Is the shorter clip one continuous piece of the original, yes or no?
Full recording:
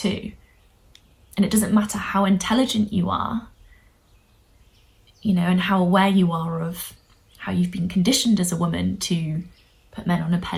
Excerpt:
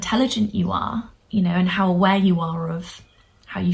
no